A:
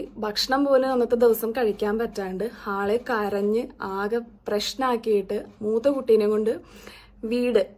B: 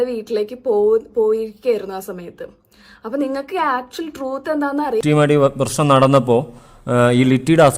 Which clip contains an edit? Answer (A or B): B